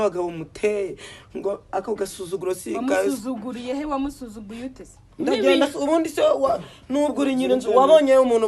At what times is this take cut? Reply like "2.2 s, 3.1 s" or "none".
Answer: 5.0 s